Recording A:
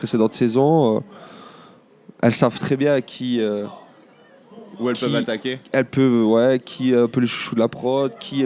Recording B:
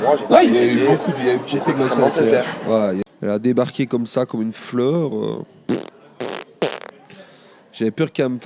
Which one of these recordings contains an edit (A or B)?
B